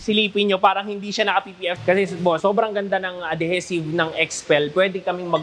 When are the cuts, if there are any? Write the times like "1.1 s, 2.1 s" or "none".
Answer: 1.8 s